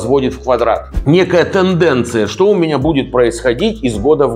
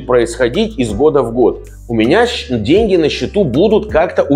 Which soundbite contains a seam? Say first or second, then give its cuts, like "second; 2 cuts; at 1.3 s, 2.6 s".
first; 1 cut; at 0.9 s